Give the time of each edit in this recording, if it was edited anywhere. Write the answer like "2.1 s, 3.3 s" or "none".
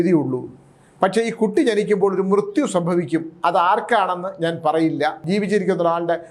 5.2 s